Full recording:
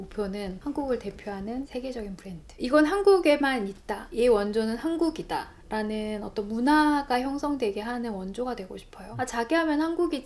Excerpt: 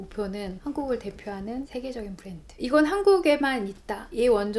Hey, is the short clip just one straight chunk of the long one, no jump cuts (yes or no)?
yes